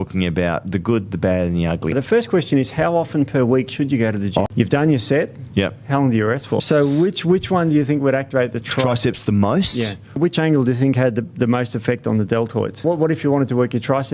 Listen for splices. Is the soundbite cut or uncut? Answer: cut